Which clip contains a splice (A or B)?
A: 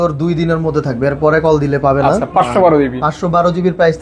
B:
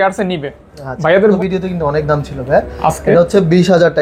B